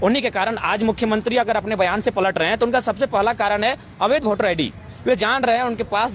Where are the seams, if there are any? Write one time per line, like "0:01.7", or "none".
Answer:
none